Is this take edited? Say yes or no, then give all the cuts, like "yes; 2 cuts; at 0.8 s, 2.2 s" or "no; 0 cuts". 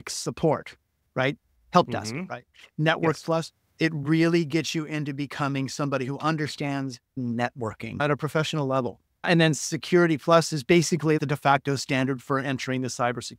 yes; 4 cuts; at 7.1 s, 8.0 s, 9.3 s, 11.2 s